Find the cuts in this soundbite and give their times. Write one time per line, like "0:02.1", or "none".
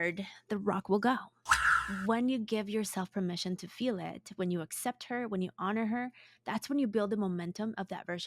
0:01.6